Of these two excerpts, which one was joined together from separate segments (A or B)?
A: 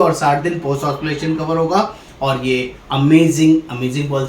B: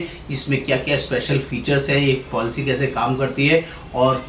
A